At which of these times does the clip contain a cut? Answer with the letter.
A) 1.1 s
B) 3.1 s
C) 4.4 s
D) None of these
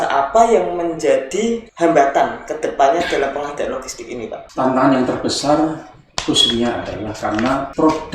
C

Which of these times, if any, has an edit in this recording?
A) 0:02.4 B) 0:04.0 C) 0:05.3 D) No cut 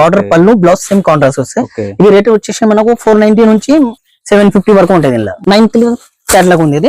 C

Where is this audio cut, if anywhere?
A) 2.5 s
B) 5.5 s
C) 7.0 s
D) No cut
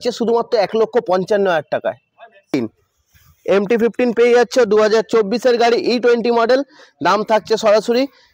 A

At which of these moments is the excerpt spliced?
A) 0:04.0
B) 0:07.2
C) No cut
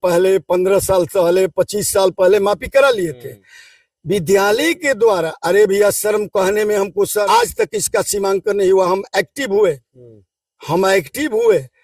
B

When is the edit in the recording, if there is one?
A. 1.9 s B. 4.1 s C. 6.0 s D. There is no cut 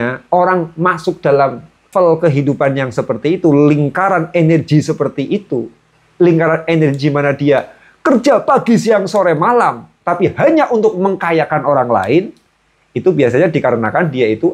A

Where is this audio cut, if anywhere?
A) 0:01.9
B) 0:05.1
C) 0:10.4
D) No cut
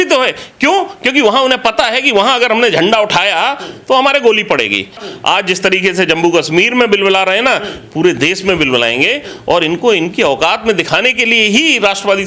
B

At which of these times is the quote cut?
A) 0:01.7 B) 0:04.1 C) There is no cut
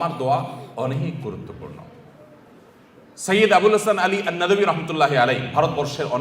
C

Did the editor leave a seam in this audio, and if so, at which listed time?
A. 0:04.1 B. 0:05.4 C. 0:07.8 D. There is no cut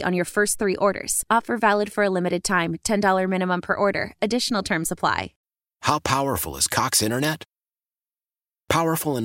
B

